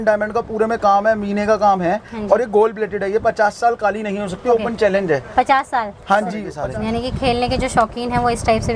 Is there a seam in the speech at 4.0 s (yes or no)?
no